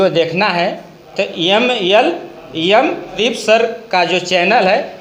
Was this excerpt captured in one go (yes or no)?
no